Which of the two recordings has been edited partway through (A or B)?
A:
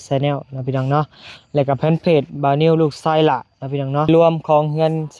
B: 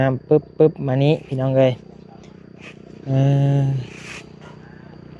A